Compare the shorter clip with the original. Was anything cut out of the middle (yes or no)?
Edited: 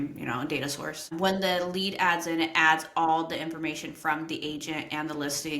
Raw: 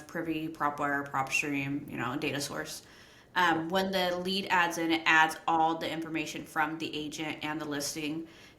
yes